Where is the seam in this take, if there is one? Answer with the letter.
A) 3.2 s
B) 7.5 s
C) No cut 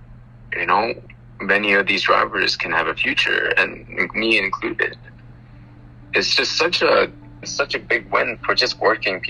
B